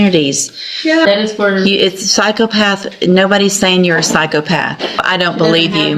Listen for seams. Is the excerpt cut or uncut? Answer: cut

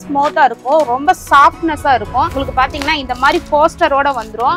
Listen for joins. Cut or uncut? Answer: cut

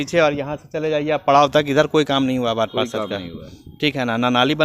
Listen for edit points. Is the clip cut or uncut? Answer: uncut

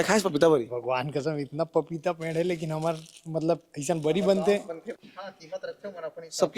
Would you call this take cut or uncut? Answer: cut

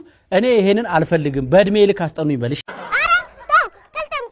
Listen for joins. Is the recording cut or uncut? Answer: cut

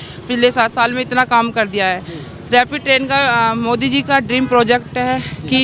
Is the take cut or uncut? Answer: uncut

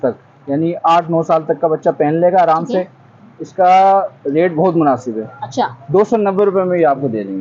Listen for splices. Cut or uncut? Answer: uncut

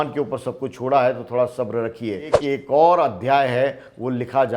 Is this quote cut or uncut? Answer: cut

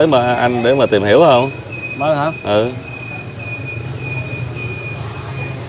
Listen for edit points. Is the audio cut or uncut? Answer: uncut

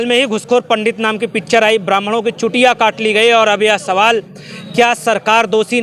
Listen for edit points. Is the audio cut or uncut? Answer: uncut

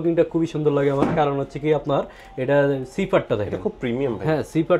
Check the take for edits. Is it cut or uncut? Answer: uncut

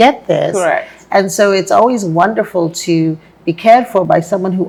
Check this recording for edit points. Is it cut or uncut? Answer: uncut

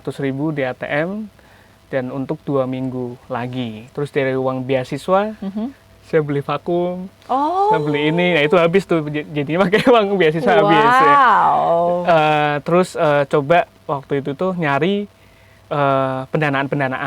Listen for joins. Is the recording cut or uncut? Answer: cut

